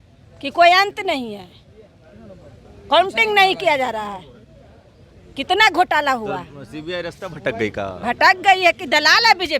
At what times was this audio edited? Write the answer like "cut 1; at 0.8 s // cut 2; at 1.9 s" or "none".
none